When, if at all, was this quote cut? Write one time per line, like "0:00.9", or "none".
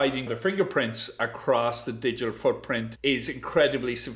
0:02.9

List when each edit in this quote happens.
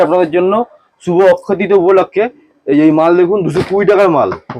none

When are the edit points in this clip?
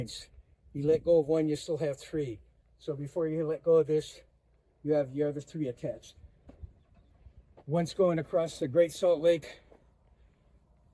none

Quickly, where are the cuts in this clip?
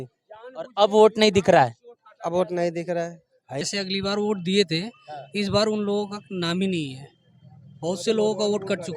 0:03.6

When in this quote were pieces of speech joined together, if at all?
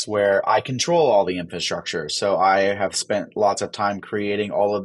none

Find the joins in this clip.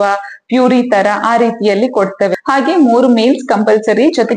0:02.4

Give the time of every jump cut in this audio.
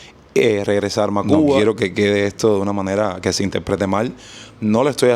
0:01.6

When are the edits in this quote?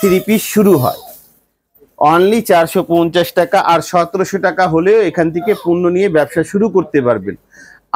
none

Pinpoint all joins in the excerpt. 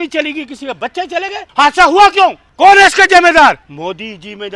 0:01.4
0:02.4
0:03.7

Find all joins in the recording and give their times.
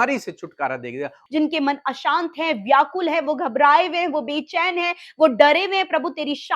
0:01.2

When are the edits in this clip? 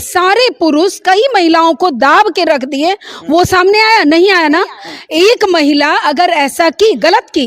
none

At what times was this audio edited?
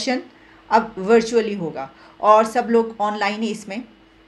none

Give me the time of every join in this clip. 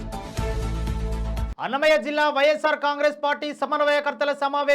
0:01.5

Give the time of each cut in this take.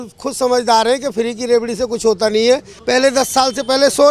0:02.7

